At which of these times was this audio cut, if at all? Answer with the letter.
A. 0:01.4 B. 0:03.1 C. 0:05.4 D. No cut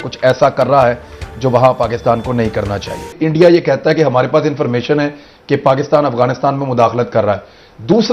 B